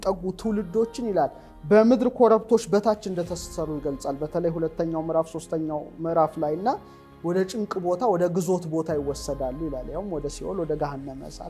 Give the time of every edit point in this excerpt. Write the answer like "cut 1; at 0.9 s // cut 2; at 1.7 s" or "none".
none

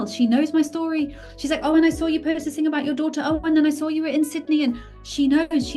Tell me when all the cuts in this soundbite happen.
none

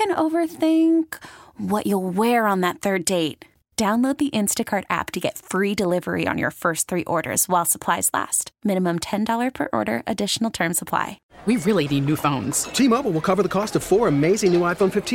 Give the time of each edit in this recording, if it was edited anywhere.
cut 1; at 11.2 s

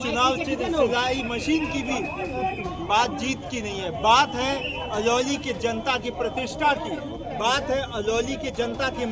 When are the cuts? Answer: none

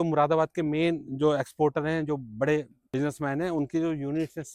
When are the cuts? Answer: cut 1; at 2.8 s

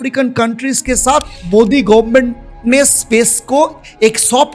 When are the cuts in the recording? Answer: cut 1; at 1.4 s

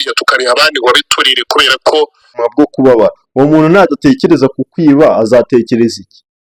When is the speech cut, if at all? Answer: cut 1; at 2.3 s

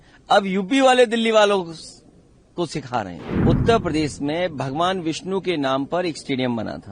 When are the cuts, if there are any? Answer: cut 1; at 3.3 s

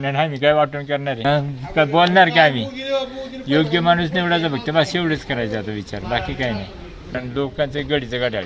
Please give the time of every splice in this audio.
cut 1; at 1.2 s // cut 2; at 7.1 s

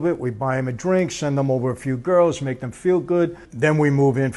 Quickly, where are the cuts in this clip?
none

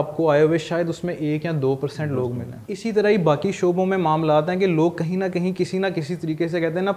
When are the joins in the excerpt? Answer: cut 1; at 2.5 s

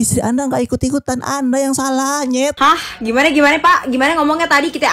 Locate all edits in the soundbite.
cut 1; at 2.5 s

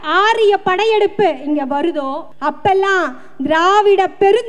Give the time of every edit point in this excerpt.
cut 1; at 2.2 s

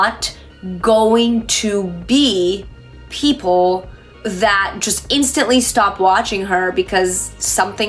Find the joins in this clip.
none

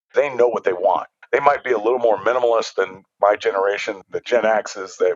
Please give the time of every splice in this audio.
cut 1; at 1.1 s // cut 2; at 3.0 s // cut 3; at 4.0 s

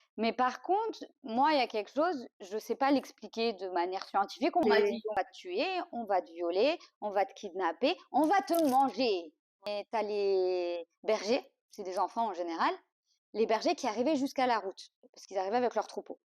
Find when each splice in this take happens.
cut 1; at 4.6 s // cut 2; at 9.7 s

